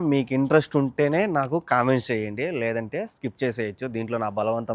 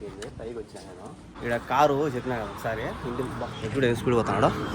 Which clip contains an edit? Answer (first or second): second